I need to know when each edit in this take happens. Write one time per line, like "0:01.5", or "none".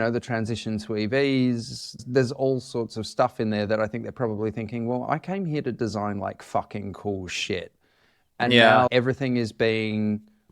0:02.0

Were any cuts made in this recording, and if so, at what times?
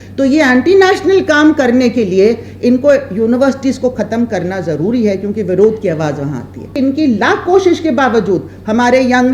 0:06.7

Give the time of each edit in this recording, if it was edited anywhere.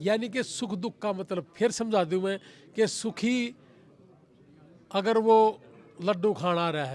none

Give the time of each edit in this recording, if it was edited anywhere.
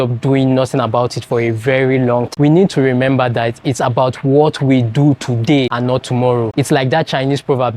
0:02.3

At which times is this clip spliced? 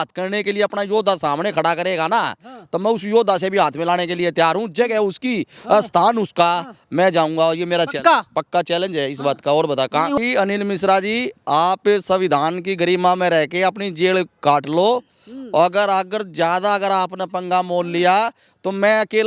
0:10.2

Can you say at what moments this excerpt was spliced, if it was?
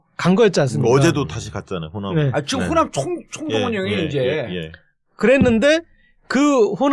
none

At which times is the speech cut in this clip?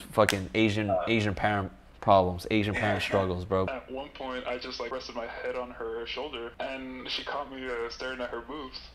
0:03.7
0:04.9
0:06.5

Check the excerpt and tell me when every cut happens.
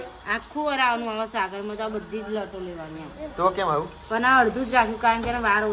none

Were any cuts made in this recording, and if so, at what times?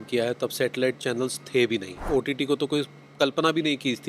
0:02.0

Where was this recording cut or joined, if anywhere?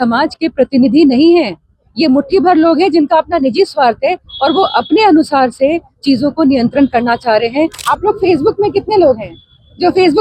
0:07.8

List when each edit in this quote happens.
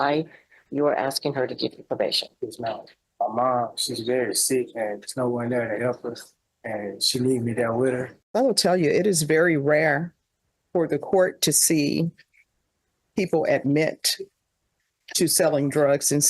0:03.0
0:08.2

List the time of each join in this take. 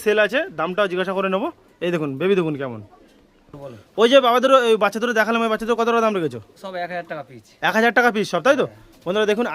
none

